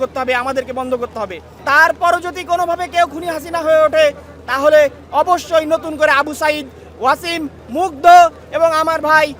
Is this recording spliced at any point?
yes; 1 cut; at 1.5 s

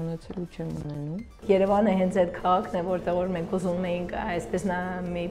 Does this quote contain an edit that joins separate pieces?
yes; 1 cut; at 1.4 s

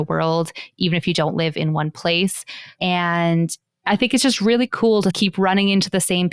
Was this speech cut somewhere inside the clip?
yes; 1 cut; at 2.8 s

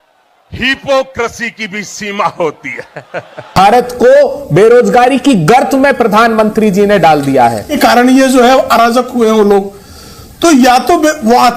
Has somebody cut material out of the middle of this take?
yes; 1 cut; at 7.7 s

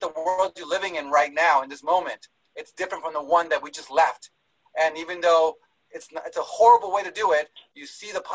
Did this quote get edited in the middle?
no; 0 cuts

